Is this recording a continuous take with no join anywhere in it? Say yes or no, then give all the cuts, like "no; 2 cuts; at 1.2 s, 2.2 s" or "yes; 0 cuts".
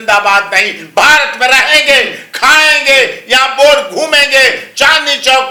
yes; 0 cuts